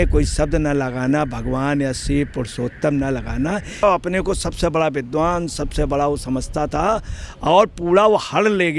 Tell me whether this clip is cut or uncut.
cut